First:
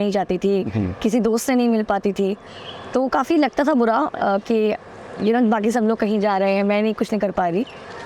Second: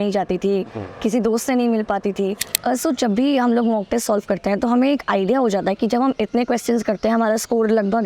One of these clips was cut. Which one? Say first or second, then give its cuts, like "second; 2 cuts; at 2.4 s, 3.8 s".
second; 1 cut; at 2.5 s